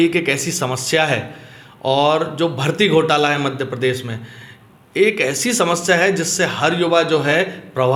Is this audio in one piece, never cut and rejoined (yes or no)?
yes